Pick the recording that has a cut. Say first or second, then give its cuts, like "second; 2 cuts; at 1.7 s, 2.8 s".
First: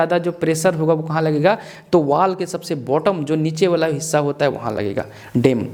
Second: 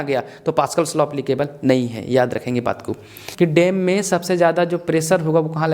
second; 1 cut; at 3.2 s